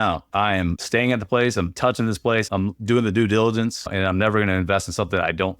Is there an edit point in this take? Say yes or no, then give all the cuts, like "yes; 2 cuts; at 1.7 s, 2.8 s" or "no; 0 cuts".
yes; 1 cut; at 3.9 s